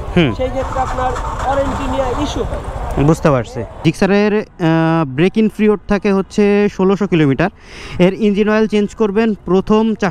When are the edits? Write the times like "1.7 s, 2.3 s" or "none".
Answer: 3.7 s